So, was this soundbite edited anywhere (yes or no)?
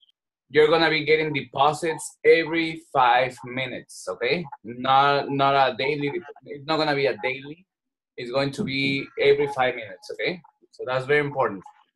no